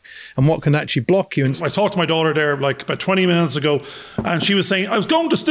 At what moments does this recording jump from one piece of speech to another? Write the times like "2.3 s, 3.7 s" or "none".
1.6 s